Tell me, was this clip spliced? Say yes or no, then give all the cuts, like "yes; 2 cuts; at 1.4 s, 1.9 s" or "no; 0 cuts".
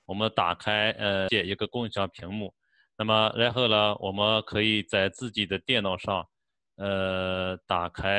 yes; 1 cut; at 1.3 s